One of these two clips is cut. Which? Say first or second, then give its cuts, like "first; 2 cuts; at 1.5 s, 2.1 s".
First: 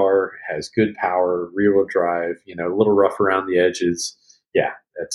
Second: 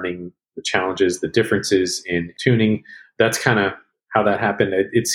second; 1 cut; at 2.3 s